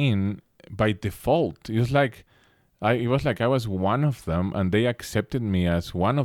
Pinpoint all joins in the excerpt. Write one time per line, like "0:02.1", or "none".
none